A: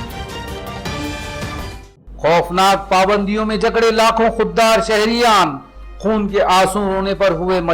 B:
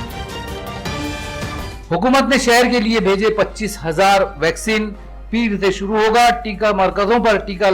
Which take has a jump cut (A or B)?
A